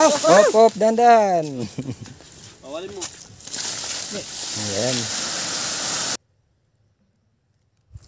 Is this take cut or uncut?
cut